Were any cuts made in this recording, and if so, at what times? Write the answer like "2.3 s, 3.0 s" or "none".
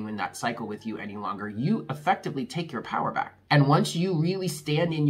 3.4 s

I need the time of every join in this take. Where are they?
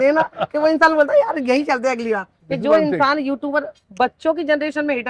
2.4 s, 3.8 s

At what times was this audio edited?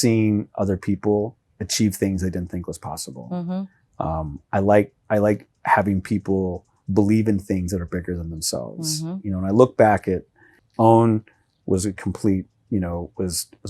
10.6 s

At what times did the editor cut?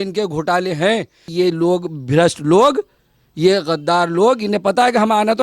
1.2 s

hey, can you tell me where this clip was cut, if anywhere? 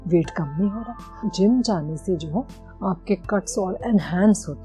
1.3 s

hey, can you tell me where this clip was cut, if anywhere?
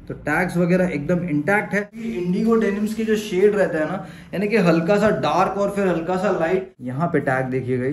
2.0 s, 6.8 s

